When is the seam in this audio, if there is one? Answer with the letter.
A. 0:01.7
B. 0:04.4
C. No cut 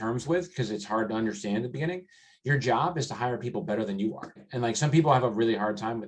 B